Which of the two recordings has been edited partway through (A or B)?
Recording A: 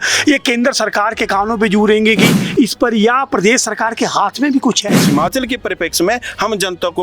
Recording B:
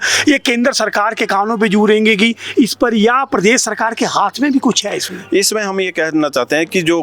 A